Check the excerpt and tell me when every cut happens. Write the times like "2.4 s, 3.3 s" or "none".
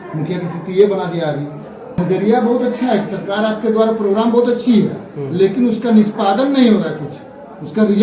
2.0 s